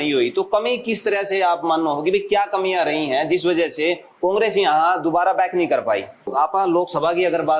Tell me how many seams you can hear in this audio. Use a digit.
1